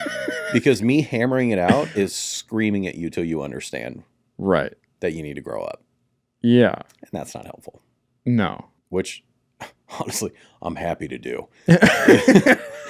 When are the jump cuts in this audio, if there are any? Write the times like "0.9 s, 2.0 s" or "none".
8.7 s